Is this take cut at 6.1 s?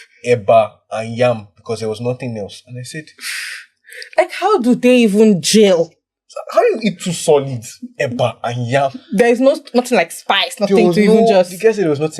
no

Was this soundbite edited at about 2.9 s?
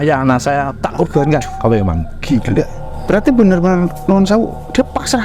yes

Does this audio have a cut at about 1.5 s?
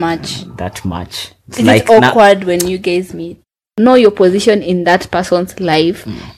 no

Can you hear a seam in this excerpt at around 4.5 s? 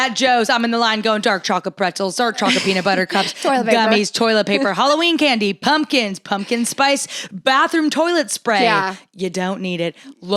no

